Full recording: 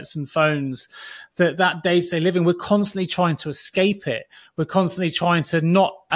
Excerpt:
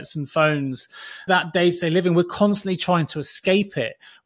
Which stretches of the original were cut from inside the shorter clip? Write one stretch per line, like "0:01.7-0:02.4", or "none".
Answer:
0:01.2-0:01.5